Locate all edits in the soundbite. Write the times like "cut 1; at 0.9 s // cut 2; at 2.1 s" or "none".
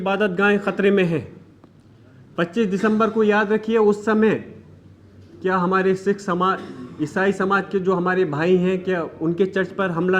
none